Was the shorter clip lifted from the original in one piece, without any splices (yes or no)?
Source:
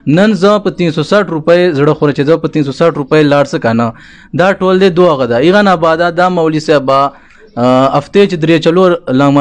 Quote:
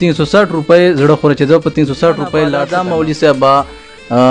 no